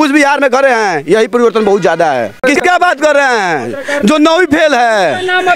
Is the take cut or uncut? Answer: cut